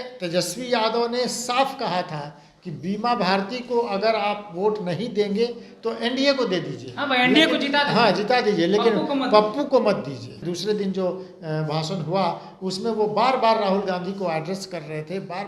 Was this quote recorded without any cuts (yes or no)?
no